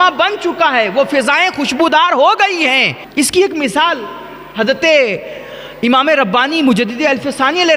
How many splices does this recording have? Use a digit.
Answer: 1